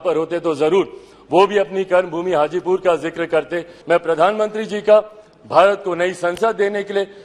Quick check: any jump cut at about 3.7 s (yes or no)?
yes